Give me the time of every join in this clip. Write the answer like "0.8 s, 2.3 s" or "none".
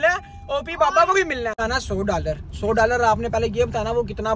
1.5 s